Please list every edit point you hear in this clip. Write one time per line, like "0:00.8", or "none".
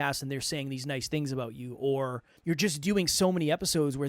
0:02.3